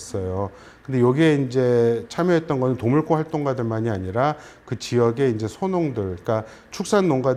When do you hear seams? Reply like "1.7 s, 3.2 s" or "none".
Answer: none